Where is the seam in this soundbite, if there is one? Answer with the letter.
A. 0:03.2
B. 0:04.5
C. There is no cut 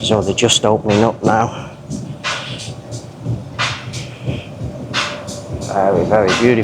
C